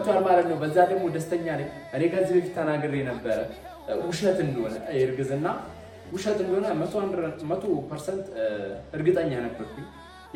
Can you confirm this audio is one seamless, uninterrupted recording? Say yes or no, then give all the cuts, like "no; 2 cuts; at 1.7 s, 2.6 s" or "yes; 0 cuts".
yes; 0 cuts